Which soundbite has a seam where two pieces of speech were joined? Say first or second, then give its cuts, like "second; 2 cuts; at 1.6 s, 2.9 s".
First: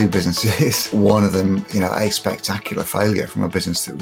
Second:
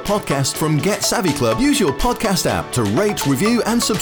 first; 1 cut; at 0.9 s